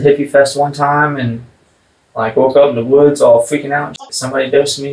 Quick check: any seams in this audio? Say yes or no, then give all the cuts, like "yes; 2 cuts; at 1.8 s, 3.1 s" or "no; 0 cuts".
yes; 1 cut; at 4.0 s